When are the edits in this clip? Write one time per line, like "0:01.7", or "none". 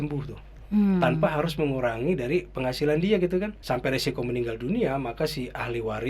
0:03.6